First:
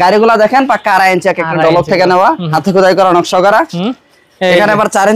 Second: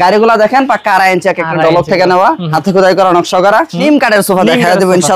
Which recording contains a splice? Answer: second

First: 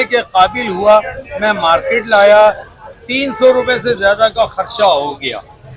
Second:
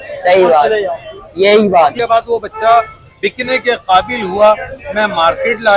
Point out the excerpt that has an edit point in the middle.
second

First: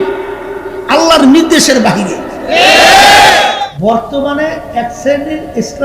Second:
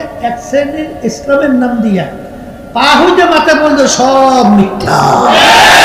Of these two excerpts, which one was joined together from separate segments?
first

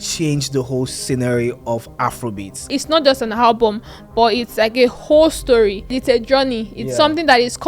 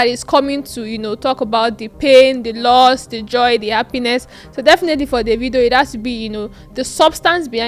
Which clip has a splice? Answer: first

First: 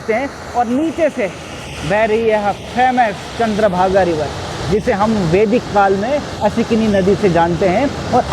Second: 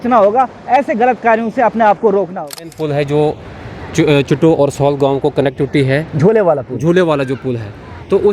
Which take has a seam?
second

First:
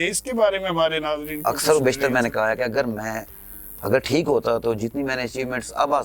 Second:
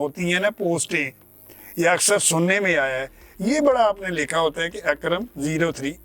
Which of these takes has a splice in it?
first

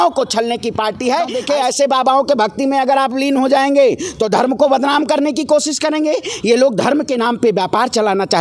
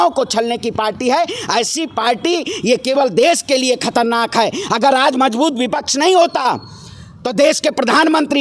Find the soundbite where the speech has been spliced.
first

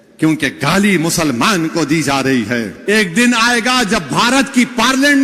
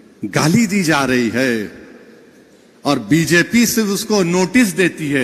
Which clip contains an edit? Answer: first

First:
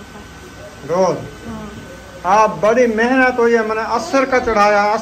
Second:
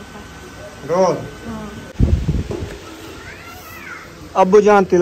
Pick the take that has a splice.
second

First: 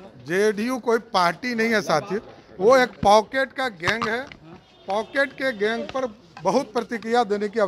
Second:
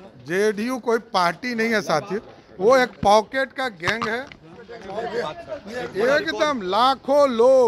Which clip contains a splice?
second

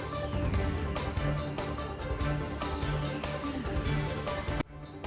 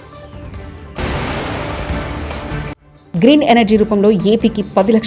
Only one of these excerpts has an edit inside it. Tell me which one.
second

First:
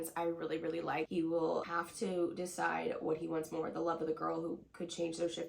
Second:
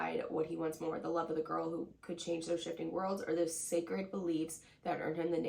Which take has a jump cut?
first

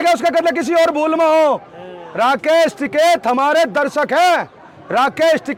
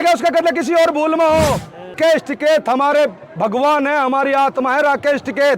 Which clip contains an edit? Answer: second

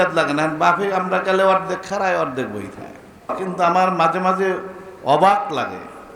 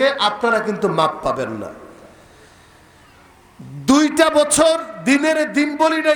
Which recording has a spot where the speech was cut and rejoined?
first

